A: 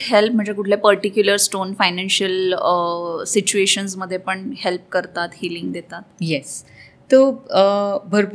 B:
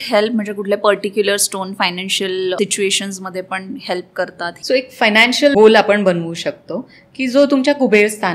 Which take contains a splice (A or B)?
B